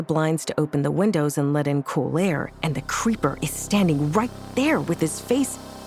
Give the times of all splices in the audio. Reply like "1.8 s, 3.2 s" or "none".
none